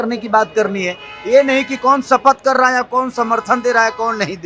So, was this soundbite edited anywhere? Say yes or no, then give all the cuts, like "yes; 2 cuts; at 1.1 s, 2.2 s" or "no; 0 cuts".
no; 0 cuts